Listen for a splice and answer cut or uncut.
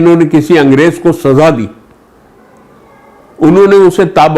uncut